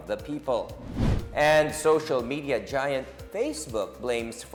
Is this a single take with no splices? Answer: yes; 0 cuts

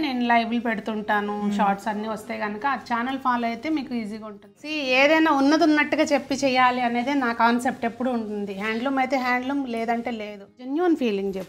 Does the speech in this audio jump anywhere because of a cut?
yes; 2 cuts; at 4.7 s, 10.6 s

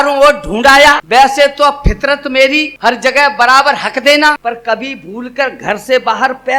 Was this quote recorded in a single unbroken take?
no; 3 cuts; at 1.0 s, 2.7 s, 4.4 s

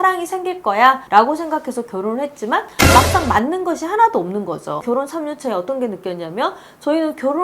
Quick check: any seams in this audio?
yes; 2 cuts; at 1.0 s, 4.8 s

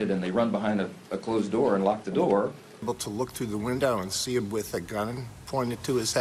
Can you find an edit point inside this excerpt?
no; 0 cuts

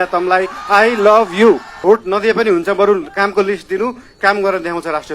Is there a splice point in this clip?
yes; 1 cut; at 1.7 s

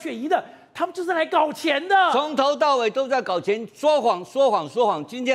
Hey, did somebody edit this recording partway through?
no; 0 cuts

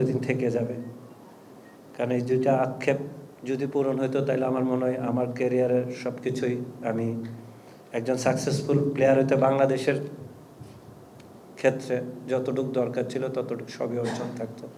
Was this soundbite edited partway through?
no; 0 cuts

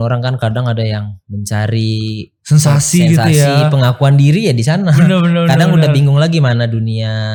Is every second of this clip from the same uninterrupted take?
yes; 0 cuts

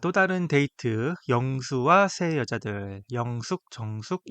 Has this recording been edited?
no; 0 cuts

